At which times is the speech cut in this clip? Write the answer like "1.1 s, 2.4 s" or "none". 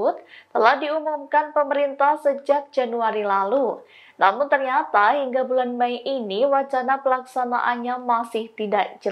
none